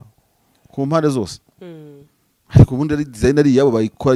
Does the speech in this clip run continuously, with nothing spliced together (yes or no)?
yes